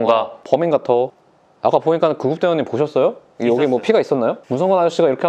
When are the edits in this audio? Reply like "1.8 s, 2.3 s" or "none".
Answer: 1.1 s

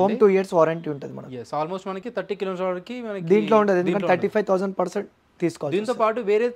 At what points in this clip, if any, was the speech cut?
none

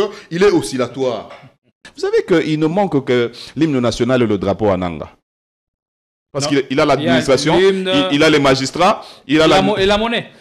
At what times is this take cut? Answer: 1.8 s

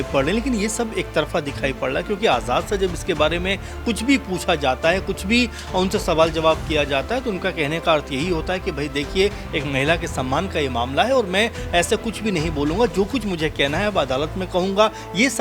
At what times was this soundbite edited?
none

